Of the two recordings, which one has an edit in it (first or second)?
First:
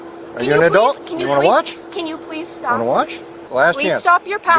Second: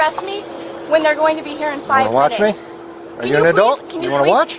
first